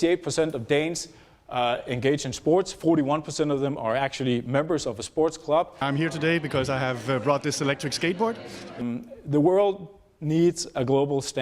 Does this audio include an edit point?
yes; 2 cuts; at 5.7 s, 8.8 s

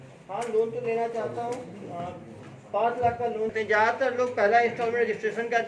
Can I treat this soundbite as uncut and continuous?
no; 1 cut; at 3.5 s

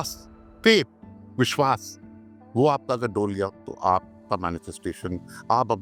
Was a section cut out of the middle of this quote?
no; 0 cuts

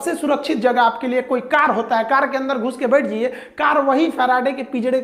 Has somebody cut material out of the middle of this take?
no; 0 cuts

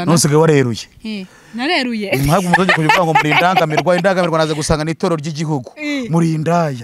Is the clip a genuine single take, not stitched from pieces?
yes; 0 cuts

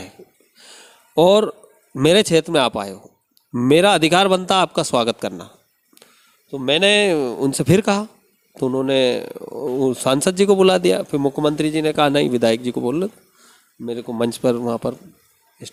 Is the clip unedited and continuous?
yes; 0 cuts

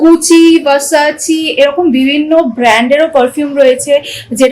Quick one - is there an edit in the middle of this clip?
no; 0 cuts

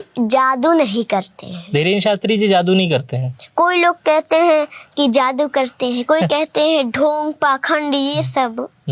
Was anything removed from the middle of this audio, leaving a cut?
no; 0 cuts

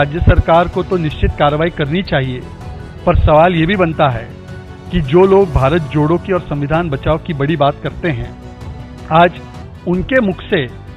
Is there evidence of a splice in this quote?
no; 0 cuts

